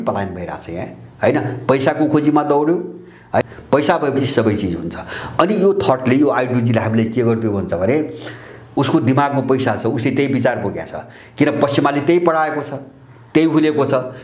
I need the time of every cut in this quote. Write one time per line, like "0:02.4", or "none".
0:03.4
0:08.6